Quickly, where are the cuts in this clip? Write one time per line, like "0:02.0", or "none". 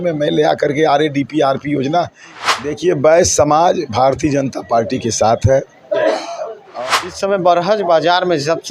0:02.2
0:06.6